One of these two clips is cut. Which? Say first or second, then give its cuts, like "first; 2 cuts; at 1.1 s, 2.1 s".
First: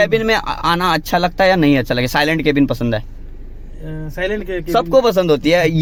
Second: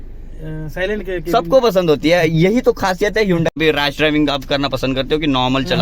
second; 1 cut; at 3.6 s